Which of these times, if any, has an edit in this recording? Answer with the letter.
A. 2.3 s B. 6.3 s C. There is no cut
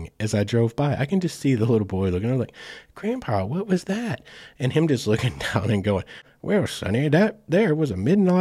B